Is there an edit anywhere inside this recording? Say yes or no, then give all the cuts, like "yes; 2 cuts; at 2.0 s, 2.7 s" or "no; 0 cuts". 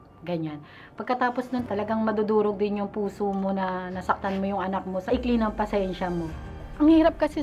yes; 3 cuts; at 1.7 s, 5.1 s, 6.6 s